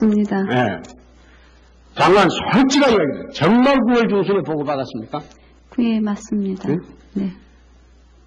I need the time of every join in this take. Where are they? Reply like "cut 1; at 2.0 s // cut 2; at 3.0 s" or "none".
cut 1; at 3.2 s